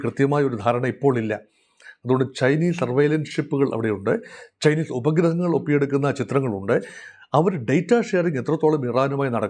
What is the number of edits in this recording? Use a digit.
0